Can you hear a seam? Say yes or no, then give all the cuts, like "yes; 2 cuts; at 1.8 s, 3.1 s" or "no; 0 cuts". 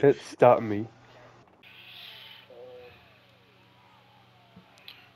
yes; 1 cut; at 1.8 s